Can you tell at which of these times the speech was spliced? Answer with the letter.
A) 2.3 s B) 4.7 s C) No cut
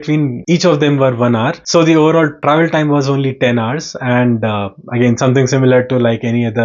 C